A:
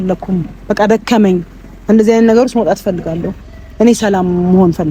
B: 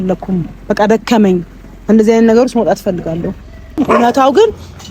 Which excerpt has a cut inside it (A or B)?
B